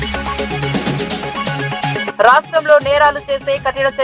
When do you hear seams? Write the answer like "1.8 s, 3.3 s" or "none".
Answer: 2.1 s